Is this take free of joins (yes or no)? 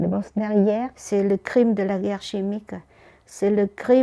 no